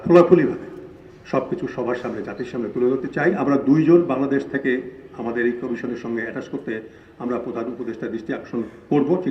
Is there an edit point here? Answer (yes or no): yes